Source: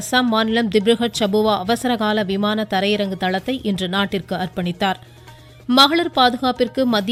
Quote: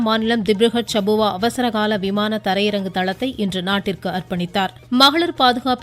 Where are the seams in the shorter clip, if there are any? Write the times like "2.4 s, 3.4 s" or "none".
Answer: 4.8 s